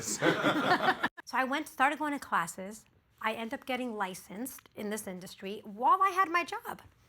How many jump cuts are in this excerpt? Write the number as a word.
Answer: one